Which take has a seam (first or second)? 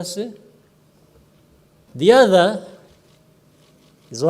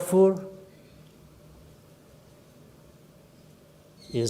first